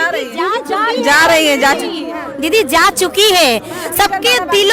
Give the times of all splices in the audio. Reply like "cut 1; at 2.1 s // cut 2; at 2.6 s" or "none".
none